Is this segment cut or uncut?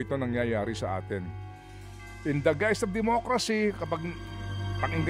uncut